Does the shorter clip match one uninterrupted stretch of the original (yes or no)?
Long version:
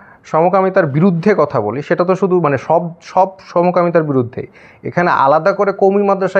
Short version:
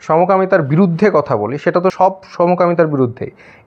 no